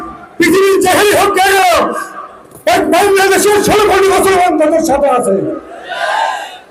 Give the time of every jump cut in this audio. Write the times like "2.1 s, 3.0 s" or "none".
none